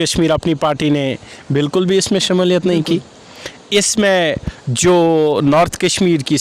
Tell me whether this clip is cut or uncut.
uncut